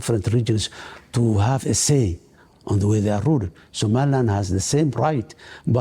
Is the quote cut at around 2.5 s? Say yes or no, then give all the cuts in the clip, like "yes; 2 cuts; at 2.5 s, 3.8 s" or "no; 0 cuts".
yes; 1 cut; at 2.5 s